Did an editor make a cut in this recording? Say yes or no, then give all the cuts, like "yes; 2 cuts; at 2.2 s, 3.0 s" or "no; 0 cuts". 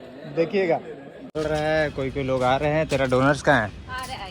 yes; 1 cut; at 1.3 s